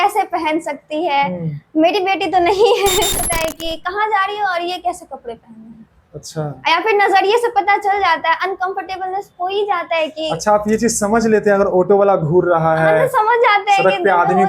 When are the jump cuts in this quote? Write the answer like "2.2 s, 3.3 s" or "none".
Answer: 3.3 s